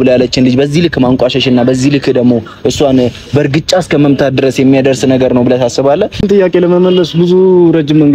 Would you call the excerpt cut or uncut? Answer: cut